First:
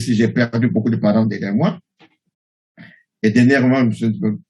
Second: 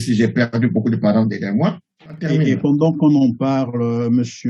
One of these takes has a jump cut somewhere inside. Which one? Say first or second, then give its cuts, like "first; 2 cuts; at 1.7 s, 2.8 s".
second; 1 cut; at 2.2 s